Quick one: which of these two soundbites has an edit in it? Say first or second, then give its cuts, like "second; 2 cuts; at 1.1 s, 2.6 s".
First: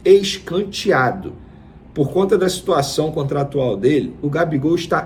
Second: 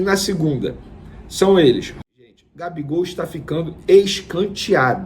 second; 1 cut; at 1.9 s